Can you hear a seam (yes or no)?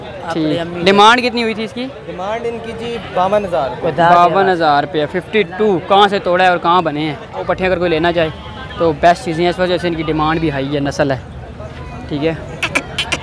yes